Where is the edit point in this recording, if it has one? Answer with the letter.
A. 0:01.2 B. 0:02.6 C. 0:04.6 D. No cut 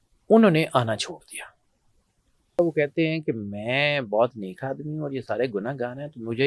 B